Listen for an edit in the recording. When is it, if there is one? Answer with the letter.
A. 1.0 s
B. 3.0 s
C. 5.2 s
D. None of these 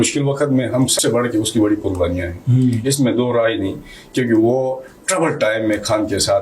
A